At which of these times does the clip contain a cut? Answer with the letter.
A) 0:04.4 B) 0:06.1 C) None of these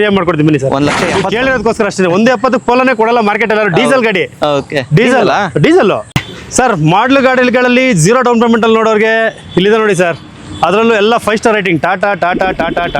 B